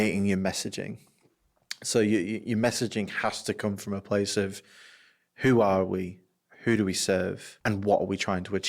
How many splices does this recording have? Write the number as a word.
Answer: one